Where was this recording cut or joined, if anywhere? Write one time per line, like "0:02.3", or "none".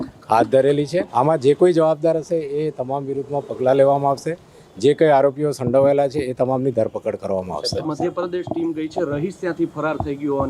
0:01.1
0:07.8

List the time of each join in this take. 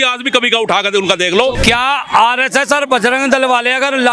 0:01.6

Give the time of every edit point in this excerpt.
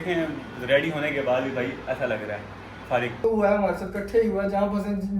0:03.2

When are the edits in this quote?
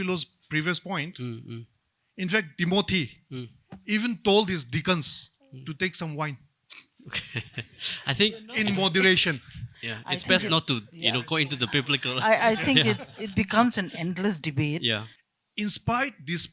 0:15.1

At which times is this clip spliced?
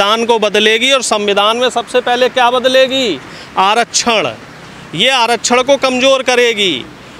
none

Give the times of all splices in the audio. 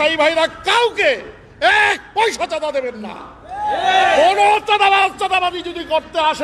none

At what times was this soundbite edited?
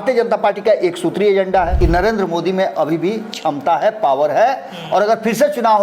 0:01.7

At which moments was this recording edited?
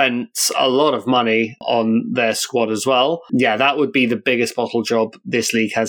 0:03.2

